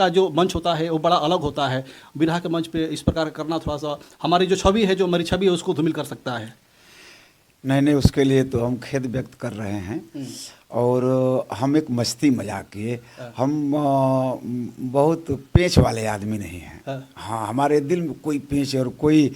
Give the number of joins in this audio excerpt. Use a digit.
0